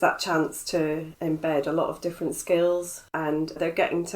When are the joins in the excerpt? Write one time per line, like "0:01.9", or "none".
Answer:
0:03.0